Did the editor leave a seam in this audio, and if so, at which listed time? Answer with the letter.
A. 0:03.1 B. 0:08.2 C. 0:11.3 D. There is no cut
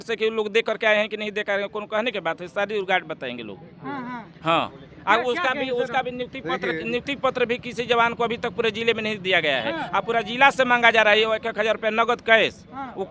D